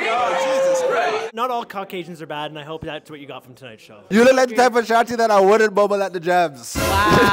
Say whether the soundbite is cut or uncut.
cut